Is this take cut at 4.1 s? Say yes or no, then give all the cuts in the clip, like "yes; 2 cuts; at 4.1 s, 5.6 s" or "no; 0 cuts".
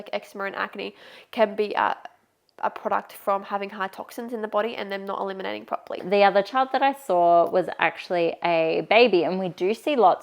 no; 1 cut; at 6.0 s